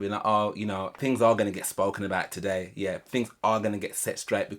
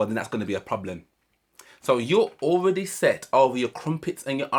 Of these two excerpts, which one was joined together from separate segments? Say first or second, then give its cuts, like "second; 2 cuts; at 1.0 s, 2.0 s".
first; 1 cut; at 0.9 s